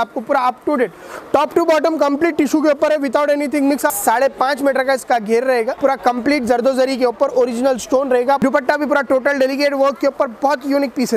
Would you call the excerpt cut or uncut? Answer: cut